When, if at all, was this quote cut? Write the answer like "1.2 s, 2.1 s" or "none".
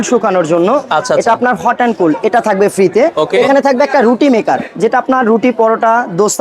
3.2 s